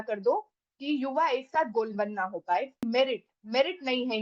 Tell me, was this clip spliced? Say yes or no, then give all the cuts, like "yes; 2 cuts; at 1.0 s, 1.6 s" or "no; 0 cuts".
yes; 1 cut; at 2.9 s